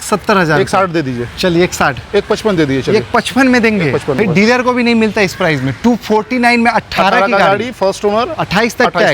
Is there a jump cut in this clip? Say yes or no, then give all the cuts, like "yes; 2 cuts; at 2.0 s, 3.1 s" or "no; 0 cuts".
yes; 1 cut; at 4.1 s